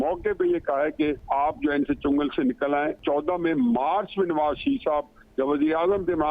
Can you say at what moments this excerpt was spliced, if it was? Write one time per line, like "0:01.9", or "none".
0:01.2
0:03.0